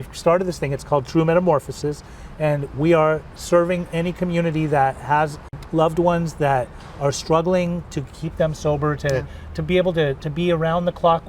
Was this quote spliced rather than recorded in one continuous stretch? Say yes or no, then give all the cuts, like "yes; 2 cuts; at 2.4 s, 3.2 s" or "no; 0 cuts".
yes; 1 cut; at 5.6 s